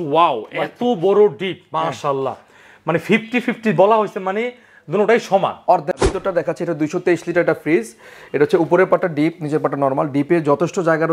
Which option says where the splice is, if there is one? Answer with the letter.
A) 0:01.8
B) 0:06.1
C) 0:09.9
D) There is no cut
B